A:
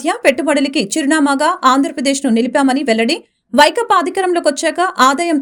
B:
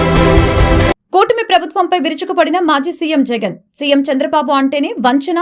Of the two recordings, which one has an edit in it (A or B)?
B